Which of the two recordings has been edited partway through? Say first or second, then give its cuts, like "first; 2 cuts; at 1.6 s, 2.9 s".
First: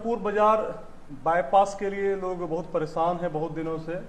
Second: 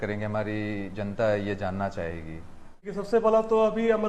second; 1 cut; at 3.1 s